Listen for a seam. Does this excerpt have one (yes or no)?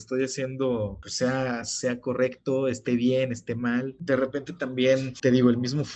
yes